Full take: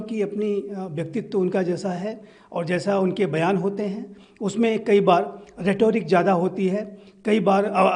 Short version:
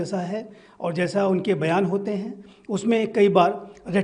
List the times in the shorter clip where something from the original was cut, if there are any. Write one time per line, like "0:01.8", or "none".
none